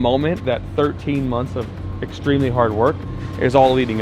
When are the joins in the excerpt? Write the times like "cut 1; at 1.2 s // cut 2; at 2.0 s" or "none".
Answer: none